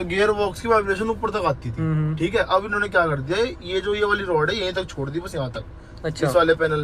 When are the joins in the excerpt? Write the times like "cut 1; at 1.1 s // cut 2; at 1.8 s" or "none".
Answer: none